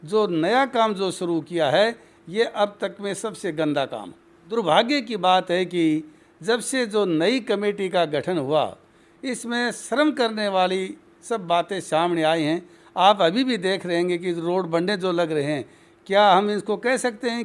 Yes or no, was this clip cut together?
yes